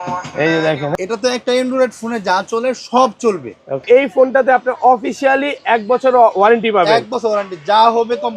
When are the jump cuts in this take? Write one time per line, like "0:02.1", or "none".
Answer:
0:00.9
0:03.8